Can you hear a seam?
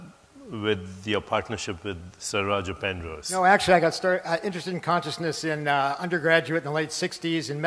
yes; 1 cut; at 1.2 s

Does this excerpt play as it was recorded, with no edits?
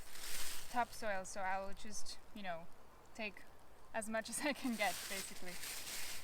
yes; 0 cuts

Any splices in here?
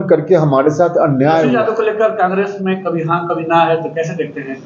yes; 1 cut; at 1.5 s

